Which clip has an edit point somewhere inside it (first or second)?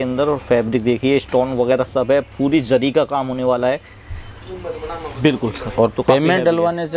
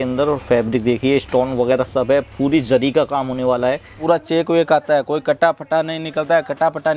second